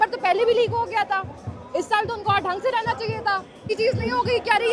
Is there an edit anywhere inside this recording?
yes; 1 cut; at 3.7 s

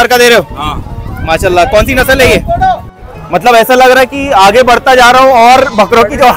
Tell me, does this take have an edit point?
yes; 1 cut; at 3.2 s

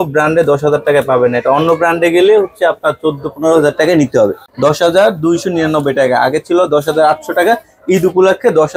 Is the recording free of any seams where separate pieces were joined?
no; 1 cut; at 4.5 s

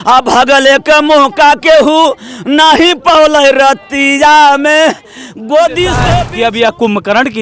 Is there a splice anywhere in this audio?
yes; 1 cut; at 6.2 s

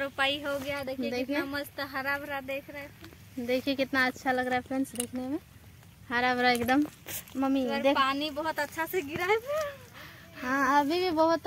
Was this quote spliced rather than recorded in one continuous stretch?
no; 0 cuts

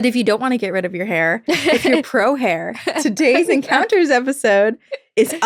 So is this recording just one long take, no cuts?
yes; 0 cuts

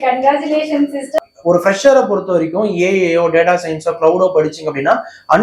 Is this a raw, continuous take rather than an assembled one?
no; 1 cut; at 1.2 s

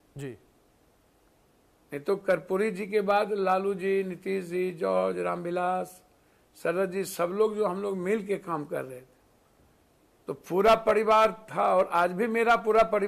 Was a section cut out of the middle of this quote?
no; 0 cuts

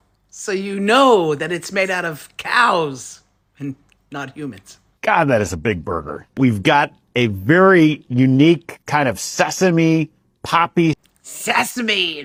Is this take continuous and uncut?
yes; 0 cuts

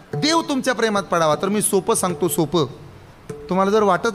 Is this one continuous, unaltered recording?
yes; 0 cuts

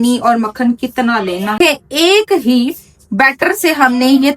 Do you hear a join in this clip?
yes; 1 cut; at 1.5 s

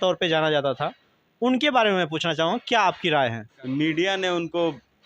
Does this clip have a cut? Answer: yes; 1 cut; at 3.5 s

